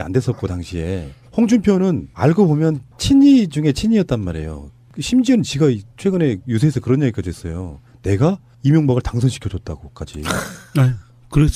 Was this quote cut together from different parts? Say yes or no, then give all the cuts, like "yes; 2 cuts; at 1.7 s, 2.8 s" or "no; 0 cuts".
yes; 1 cut; at 6.6 s